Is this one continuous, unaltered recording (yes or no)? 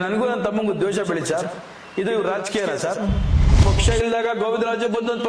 no